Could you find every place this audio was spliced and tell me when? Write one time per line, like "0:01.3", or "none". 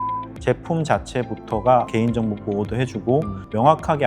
0:01.9